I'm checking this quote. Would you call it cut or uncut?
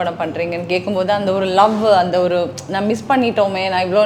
uncut